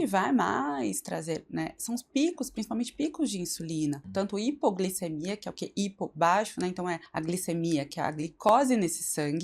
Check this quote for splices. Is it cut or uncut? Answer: cut